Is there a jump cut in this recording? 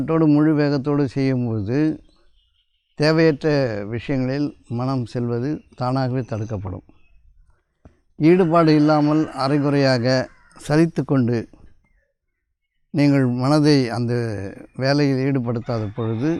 no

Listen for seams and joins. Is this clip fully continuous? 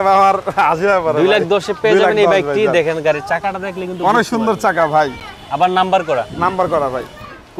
yes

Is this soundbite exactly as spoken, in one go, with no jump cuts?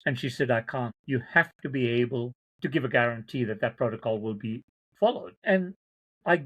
no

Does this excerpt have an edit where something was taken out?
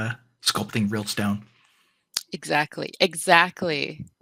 no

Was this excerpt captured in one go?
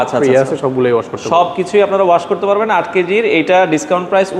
yes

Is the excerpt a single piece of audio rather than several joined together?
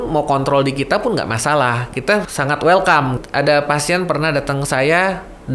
no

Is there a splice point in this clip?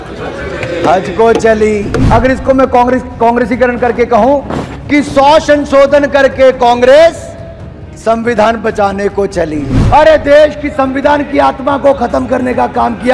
yes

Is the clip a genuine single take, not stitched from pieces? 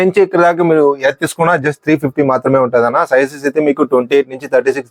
yes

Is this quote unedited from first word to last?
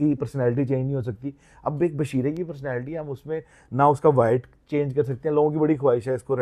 yes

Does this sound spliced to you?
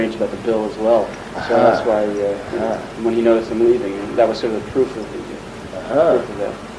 no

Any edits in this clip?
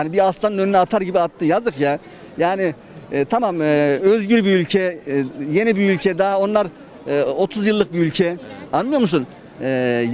no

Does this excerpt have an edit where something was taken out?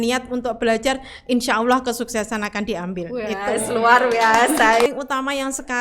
yes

